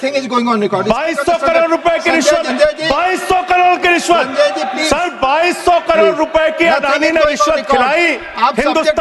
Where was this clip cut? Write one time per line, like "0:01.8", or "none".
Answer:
0:02.5
0:04.7